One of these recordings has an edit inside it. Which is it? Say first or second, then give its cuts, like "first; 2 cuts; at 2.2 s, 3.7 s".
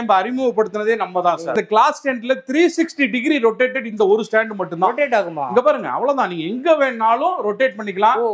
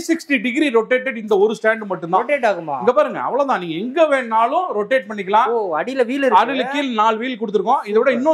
first; 1 cut; at 1.5 s